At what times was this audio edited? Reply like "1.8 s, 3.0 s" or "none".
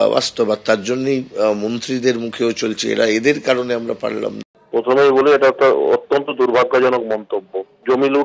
4.5 s